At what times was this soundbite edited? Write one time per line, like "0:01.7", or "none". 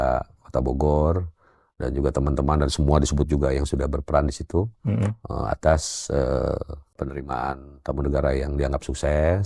0:07.1